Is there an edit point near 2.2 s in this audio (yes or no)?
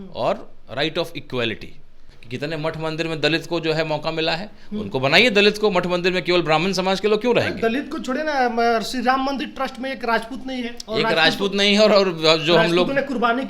yes